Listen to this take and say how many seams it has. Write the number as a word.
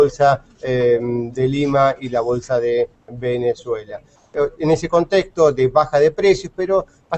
one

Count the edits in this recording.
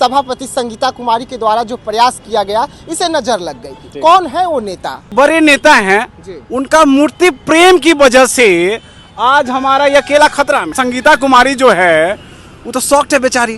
two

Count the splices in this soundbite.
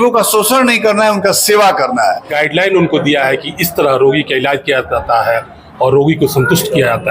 one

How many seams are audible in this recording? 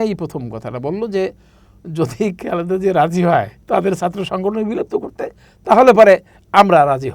one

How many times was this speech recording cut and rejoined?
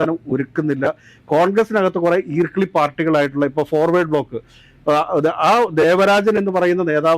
zero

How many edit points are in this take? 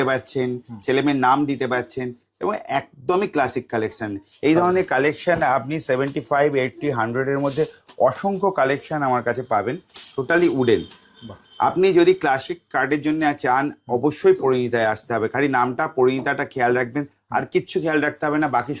zero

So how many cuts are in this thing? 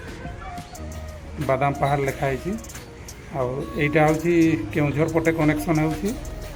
zero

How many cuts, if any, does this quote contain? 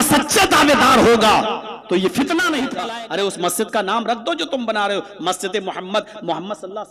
one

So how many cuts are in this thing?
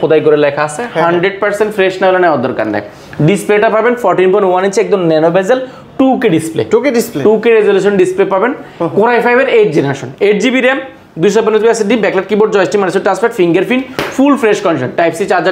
zero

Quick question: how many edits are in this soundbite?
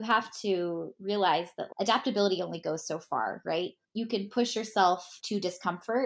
zero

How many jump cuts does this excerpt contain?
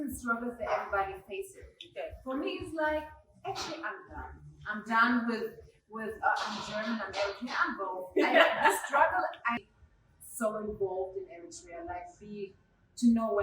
one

